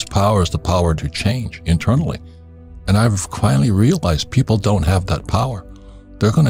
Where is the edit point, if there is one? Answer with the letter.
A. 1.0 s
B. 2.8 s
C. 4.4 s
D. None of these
D